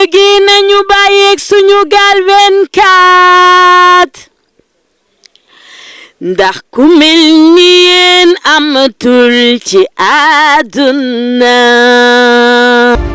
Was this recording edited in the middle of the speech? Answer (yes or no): no